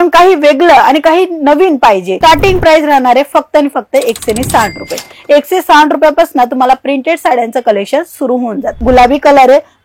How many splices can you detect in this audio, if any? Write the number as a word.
two